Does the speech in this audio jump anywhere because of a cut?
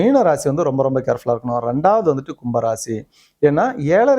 no; 0 cuts

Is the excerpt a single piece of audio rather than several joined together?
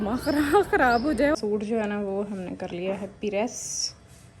no; 1 cut; at 1.3 s

